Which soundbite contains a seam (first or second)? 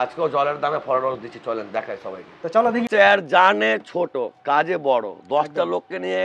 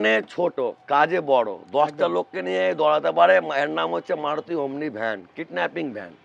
first